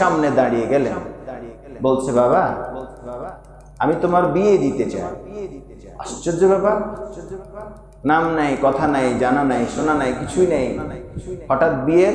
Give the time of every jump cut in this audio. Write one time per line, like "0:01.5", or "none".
none

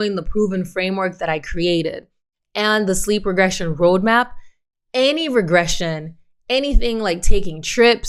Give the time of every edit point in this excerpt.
none

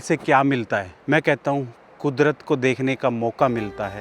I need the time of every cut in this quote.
0:00.9

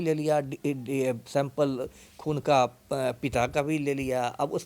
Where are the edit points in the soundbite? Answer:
none

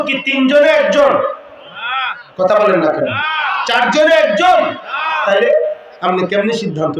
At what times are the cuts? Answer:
none

